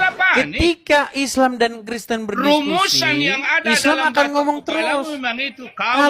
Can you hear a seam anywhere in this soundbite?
no; 0 cuts

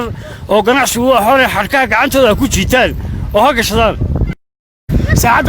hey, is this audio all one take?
no; 1 cut; at 4.5 s

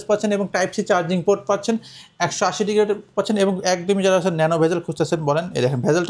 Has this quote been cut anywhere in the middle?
no; 0 cuts

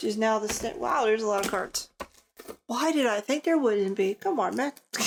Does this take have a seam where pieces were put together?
no; 0 cuts

